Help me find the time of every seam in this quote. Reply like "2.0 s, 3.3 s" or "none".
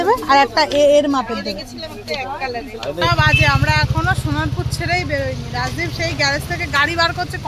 3.0 s